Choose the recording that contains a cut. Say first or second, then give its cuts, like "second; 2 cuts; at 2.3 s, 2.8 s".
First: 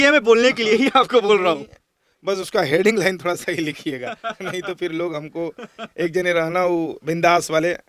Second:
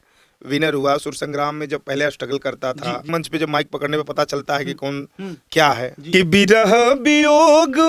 second; 2 cuts; at 3.1 s, 5.9 s